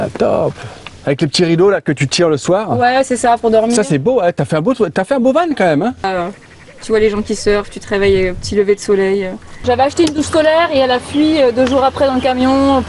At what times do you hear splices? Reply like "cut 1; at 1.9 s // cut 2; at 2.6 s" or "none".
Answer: cut 1; at 6.1 s // cut 2; at 9.5 s